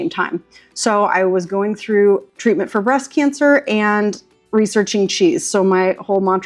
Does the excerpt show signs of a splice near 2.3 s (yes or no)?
yes